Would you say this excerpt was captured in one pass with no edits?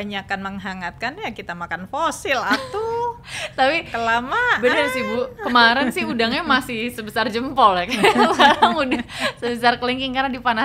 yes; 0 cuts

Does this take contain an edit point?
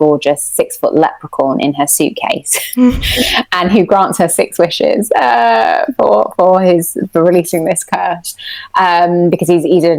no; 0 cuts

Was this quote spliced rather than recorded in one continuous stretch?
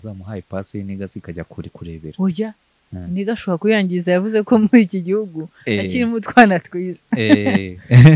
no; 0 cuts

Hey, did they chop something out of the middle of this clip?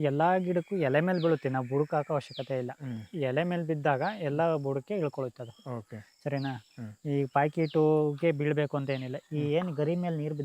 no; 0 cuts

